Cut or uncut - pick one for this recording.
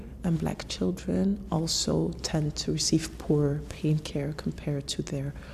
uncut